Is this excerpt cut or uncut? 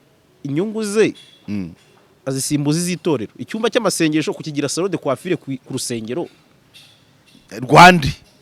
uncut